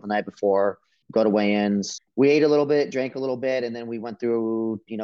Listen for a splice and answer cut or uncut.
cut